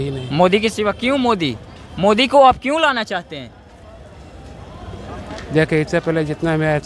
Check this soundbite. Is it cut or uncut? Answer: uncut